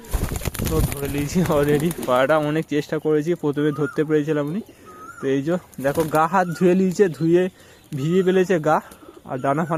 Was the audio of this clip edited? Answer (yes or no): no